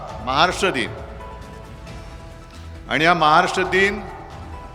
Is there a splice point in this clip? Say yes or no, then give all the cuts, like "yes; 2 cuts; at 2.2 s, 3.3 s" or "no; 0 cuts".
yes; 2 cuts; at 1.1 s, 2.5 s